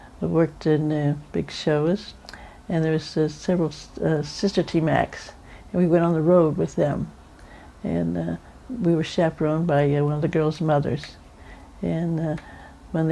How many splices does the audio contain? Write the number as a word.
one